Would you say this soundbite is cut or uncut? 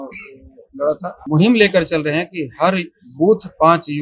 cut